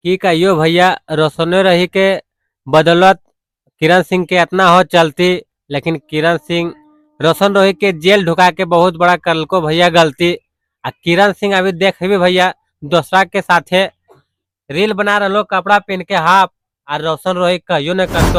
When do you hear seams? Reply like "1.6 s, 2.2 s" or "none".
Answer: none

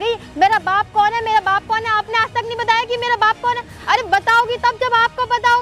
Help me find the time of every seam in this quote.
none

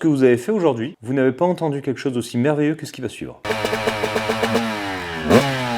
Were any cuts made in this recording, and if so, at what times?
0.9 s, 3.5 s

